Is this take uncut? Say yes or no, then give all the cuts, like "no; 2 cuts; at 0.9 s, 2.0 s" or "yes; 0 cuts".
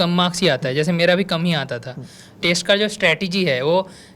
no; 1 cut; at 2.4 s